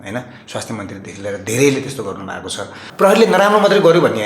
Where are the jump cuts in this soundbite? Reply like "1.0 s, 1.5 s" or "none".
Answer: 2.9 s

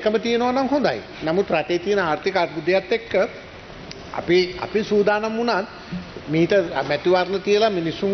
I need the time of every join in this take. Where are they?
none

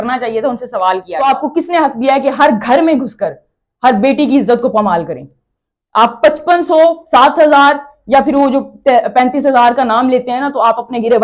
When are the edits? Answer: 1.1 s

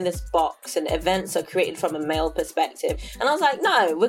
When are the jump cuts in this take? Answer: 3.0 s

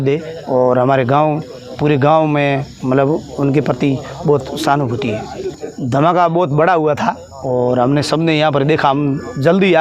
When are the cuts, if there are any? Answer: 5.6 s

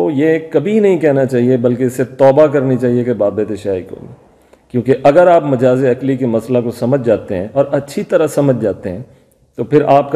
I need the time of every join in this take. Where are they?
none

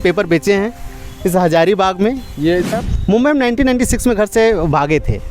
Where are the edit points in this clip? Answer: 2.7 s

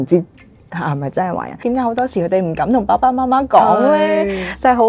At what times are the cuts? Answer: 1.6 s

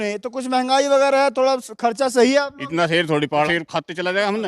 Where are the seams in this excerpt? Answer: 3.5 s

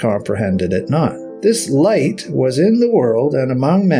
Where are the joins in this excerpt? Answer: 1.3 s

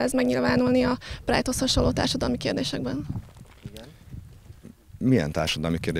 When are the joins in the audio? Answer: none

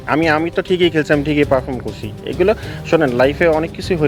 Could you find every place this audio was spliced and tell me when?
none

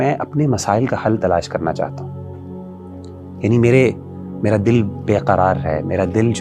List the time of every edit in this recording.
none

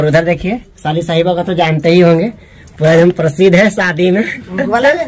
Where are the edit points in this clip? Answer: none

